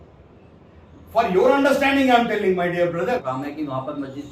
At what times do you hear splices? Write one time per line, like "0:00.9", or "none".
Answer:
0:03.2